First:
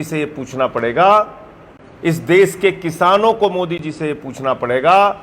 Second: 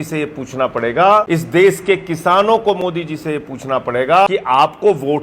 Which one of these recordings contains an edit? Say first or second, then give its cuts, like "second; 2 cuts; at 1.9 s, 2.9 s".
second; 2 cuts; at 1.3 s, 4.3 s